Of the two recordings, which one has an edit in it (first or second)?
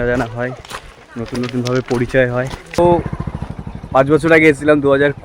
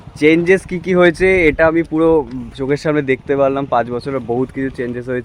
first